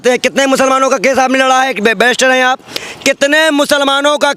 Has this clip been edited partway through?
no; 0 cuts

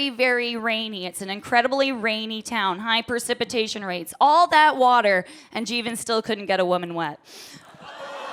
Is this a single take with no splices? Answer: yes; 0 cuts

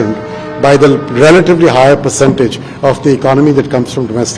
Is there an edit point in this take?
no; 0 cuts

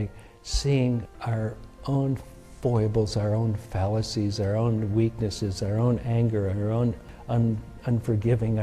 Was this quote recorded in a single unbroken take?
no; 2 cuts; at 1.1 s, 7.1 s

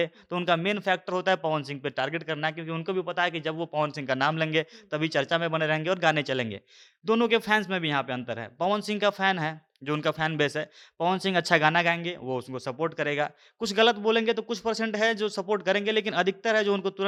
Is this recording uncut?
yes; 0 cuts

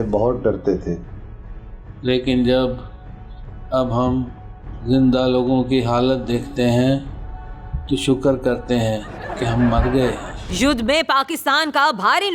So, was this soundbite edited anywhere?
yes; 1 cut; at 10.3 s

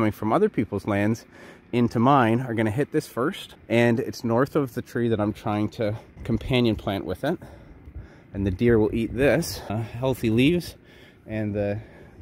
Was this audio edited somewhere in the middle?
yes; 3 cuts; at 3.5 s, 6.1 s, 9.8 s

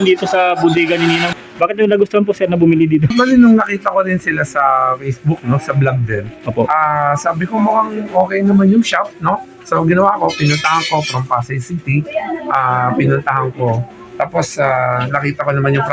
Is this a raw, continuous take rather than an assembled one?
no; 2 cuts; at 1.3 s, 3.1 s

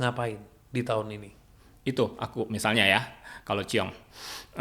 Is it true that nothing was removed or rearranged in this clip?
yes; 0 cuts

